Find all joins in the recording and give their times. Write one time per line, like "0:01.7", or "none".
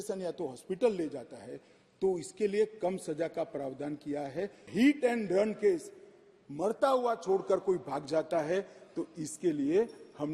0:04.7